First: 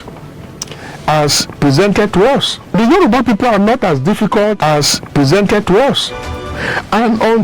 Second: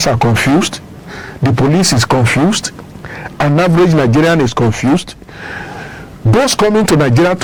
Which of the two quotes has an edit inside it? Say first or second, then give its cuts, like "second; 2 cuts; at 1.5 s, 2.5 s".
first; 3 cuts; at 2.6 s, 4.6 s, 6.5 s